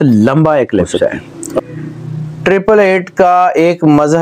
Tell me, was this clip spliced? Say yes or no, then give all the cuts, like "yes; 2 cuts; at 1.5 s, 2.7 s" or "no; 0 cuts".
yes; 1 cut; at 1.6 s